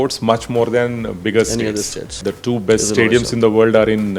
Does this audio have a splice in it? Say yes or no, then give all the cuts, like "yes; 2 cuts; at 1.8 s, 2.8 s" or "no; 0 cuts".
yes; 1 cut; at 2.3 s